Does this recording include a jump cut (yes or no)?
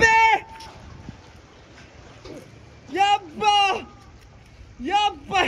no